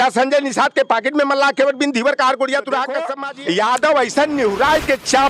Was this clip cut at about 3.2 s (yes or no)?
yes